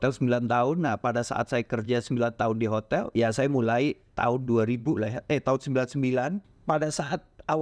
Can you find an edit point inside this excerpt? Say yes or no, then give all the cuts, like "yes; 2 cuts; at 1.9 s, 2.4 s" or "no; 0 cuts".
yes; 2 cuts; at 3.1 s, 6.5 s